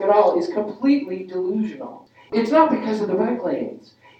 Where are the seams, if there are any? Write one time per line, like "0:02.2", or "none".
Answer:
0:02.3